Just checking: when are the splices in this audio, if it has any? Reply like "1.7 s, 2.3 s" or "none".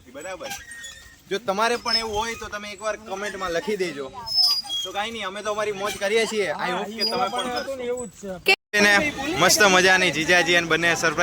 8.5 s